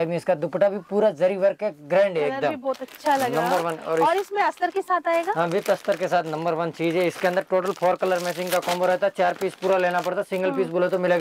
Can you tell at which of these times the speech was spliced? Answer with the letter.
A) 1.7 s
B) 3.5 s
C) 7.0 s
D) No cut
D